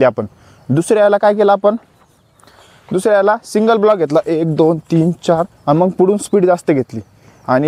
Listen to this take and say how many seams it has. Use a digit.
0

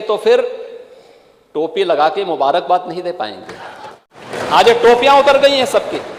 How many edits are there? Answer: 1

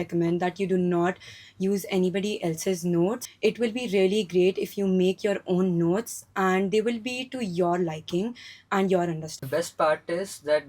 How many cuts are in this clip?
2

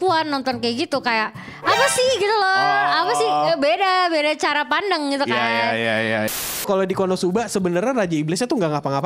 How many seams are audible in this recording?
1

